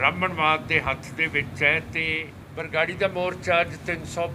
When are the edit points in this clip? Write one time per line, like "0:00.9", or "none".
0:02.4